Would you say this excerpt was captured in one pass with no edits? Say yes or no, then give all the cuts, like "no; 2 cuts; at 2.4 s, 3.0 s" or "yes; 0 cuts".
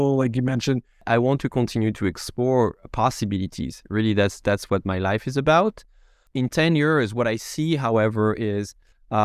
no; 2 cuts; at 1.0 s, 6.2 s